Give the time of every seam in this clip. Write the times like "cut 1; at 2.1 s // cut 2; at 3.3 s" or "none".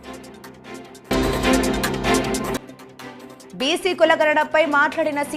cut 1; at 1.0 s